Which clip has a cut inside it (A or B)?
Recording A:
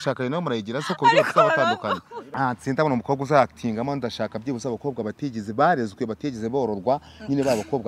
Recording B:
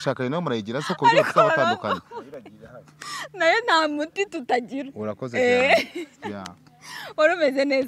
A